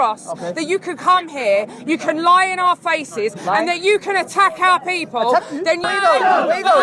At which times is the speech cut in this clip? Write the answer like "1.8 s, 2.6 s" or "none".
5.8 s